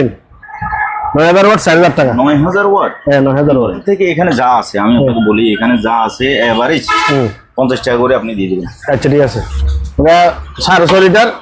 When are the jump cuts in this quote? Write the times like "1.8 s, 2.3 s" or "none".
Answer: 3.8 s, 9.5 s